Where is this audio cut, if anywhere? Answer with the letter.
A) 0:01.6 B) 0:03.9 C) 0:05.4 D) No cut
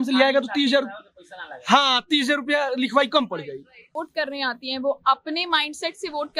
B